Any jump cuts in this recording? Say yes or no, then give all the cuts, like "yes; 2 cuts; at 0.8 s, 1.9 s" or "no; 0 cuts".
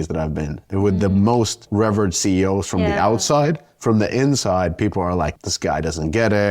yes; 2 cuts; at 1.6 s, 5.3 s